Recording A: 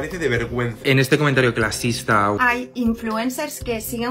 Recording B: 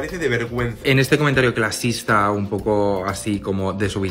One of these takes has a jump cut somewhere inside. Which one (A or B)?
A